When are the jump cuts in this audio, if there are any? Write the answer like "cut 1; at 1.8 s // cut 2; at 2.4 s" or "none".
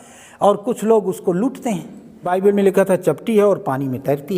cut 1; at 2.3 s

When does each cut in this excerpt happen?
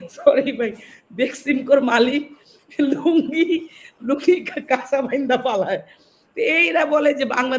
none

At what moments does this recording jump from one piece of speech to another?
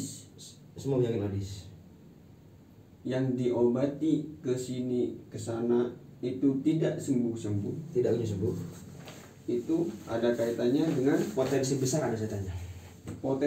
none

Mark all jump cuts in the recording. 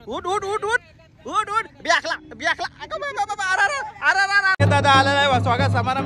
cut 1; at 4.6 s

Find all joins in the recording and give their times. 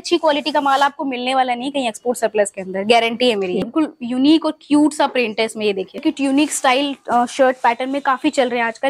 cut 1; at 3.6 s // cut 2; at 6.0 s

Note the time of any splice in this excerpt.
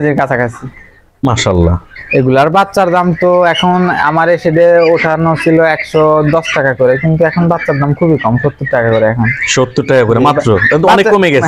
cut 1; at 2.0 s

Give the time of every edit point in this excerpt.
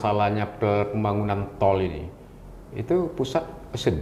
none

